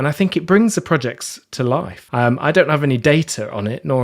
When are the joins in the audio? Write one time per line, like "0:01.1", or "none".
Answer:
0:02.0